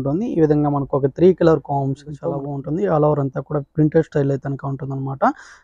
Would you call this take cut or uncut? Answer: cut